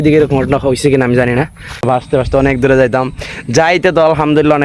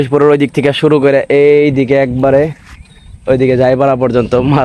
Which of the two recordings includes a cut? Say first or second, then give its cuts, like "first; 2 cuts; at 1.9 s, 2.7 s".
first; 1 cut; at 1.8 s